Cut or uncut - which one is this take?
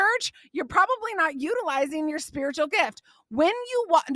uncut